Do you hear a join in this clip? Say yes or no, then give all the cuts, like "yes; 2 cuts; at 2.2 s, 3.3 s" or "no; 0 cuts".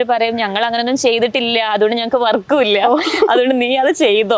no; 0 cuts